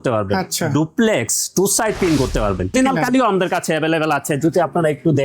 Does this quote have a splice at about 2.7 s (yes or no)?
yes